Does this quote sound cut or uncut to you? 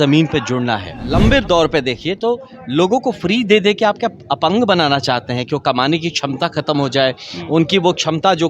cut